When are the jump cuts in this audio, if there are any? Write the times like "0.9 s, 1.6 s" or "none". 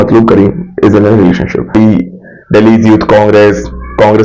1.7 s